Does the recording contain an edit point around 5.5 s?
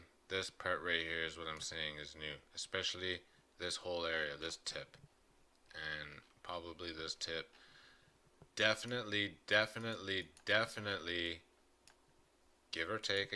no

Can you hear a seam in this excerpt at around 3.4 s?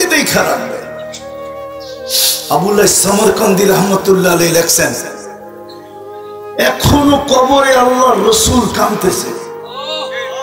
no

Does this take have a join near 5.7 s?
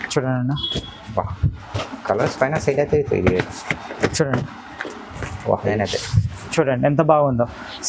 yes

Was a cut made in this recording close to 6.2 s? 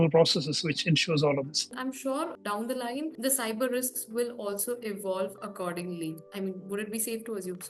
no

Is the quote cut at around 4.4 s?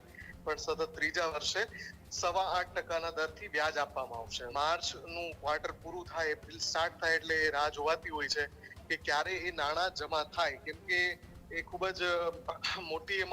yes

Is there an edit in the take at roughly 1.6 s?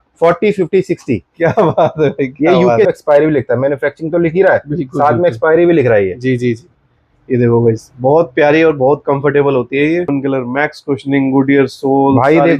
no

